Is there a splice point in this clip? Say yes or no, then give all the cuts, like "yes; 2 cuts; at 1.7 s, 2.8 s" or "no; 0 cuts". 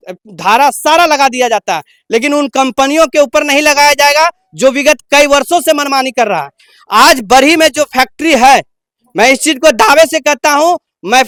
no; 0 cuts